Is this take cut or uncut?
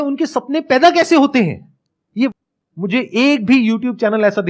cut